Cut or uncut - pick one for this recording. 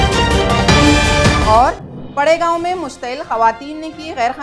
cut